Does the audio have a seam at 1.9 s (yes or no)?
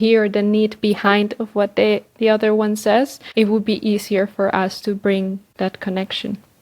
no